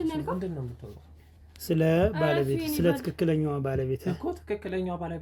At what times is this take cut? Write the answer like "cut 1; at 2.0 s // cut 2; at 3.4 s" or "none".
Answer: none